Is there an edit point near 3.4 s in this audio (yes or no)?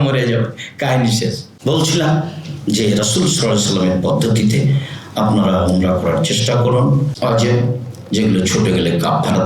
no